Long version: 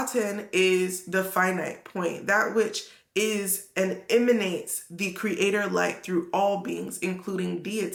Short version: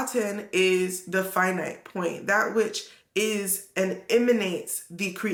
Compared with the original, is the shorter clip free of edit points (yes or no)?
yes